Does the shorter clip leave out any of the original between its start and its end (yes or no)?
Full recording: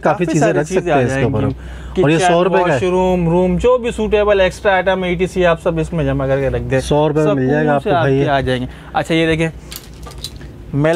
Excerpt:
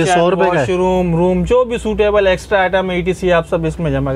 no